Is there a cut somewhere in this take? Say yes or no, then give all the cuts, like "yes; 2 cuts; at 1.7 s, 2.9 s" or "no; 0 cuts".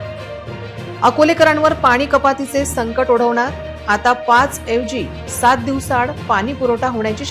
yes; 1 cut; at 0.9 s